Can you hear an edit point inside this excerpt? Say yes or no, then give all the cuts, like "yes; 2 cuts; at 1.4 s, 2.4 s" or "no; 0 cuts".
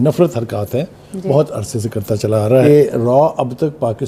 yes; 1 cut; at 2.6 s